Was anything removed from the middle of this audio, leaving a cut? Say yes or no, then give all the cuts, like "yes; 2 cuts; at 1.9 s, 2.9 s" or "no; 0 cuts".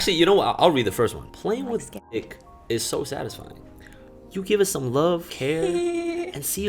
yes; 1 cut; at 5.3 s